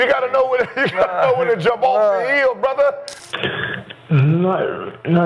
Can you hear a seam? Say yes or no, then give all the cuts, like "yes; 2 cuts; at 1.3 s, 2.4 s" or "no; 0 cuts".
yes; 1 cut; at 3.1 s